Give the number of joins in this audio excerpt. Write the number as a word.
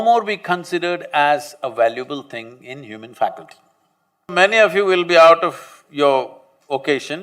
one